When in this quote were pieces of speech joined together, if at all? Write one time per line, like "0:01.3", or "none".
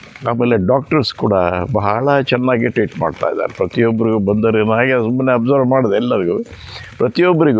none